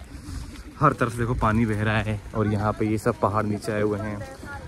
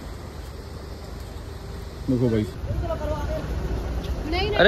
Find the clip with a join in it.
second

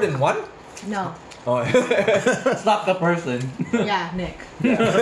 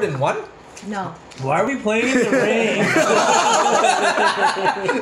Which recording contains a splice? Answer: second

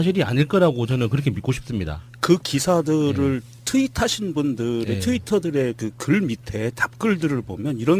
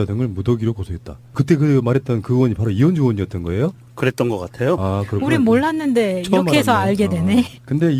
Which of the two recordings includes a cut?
second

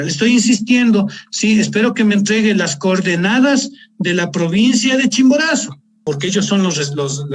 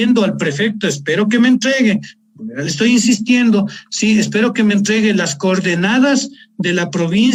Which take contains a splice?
first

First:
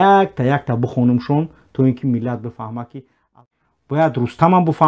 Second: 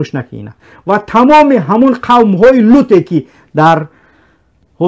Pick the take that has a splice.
first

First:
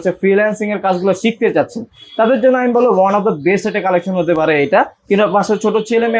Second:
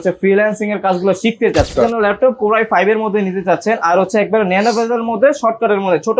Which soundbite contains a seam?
second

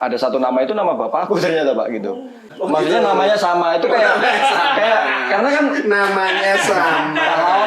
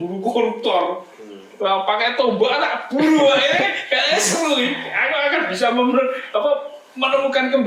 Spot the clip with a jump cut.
first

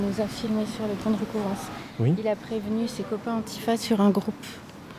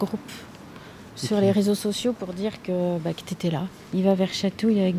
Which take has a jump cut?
second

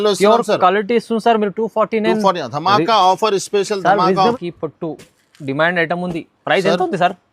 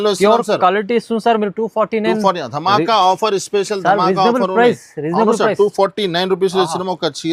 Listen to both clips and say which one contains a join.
first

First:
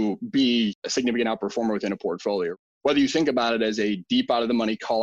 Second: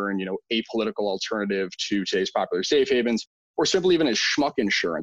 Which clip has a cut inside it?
first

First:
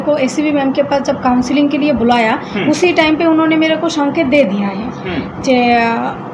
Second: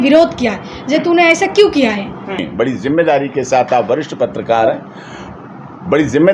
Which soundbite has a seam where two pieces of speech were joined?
second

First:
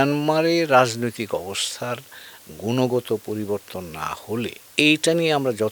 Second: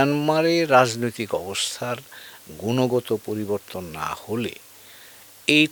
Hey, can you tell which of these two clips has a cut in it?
first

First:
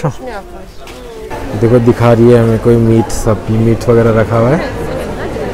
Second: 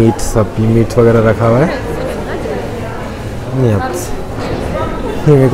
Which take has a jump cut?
first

